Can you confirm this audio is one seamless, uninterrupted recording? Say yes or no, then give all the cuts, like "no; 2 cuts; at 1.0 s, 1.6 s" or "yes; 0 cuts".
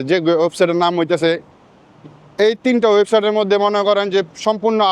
no; 1 cut; at 1.5 s